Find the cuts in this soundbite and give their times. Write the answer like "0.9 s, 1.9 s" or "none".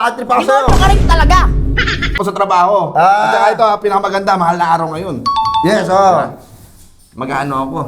2.2 s